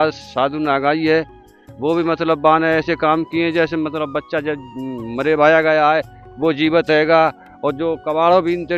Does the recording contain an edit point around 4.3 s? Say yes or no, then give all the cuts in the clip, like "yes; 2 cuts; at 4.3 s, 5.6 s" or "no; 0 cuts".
no; 0 cuts